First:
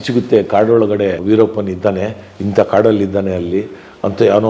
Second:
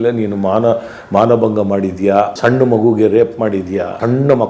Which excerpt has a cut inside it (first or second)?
first